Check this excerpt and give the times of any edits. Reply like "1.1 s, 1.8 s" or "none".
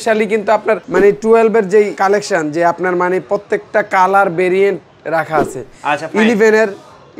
0.9 s, 1.9 s